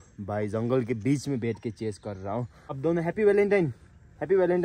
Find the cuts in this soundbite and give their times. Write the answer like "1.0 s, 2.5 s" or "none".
2.6 s